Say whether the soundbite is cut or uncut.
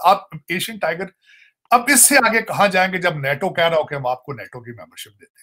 uncut